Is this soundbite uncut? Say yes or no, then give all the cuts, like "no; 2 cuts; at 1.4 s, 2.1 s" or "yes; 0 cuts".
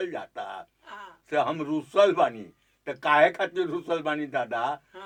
yes; 0 cuts